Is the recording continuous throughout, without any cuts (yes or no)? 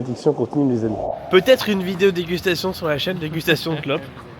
no